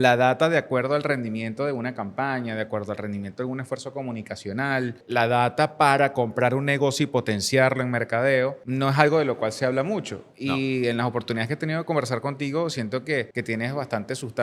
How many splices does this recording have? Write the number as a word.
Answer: three